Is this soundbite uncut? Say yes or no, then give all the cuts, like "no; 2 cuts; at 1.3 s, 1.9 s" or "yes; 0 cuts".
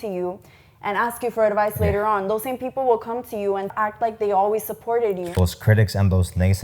no; 2 cuts; at 3.7 s, 5.3 s